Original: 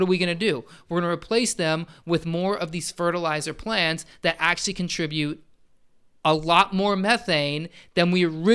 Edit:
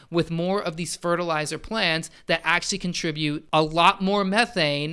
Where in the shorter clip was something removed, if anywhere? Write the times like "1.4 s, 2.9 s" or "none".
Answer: 3.4 s